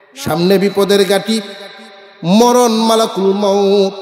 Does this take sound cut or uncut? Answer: uncut